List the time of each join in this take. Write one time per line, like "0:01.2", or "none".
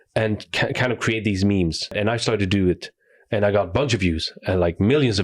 0:01.9